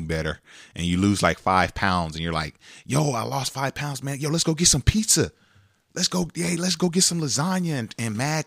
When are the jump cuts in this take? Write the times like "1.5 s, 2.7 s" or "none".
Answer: none